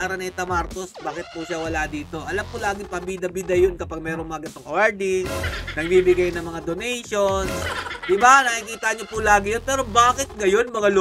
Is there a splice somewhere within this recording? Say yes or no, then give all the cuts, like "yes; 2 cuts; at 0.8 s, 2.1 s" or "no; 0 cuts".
no; 0 cuts